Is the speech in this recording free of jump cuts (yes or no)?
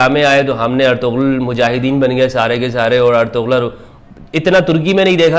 yes